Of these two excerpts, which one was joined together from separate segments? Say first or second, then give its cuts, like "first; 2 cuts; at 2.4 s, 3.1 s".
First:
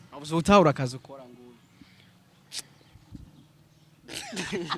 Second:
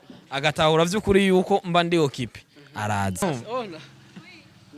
second; 1 cut; at 3.2 s